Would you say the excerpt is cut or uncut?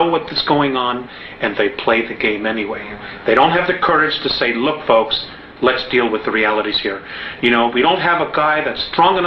uncut